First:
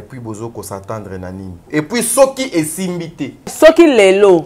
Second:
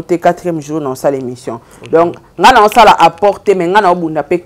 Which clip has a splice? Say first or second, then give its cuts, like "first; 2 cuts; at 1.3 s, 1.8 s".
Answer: first; 2 cuts; at 1.6 s, 3.5 s